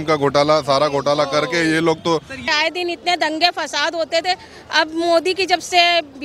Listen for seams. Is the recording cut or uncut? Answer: cut